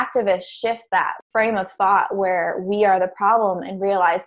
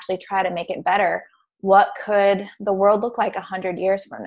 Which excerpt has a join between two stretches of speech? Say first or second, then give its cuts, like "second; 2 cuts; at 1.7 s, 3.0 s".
first; 1 cut; at 1.2 s